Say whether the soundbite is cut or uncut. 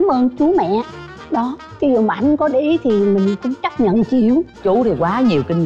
cut